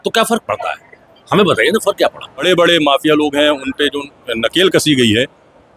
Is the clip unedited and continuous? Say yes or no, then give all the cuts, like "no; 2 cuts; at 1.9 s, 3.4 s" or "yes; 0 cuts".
no; 1 cut; at 2.4 s